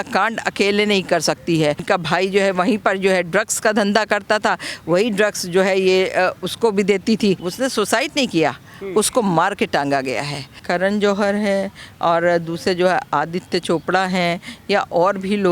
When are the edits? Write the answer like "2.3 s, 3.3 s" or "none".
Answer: 1.8 s, 7.5 s, 10.6 s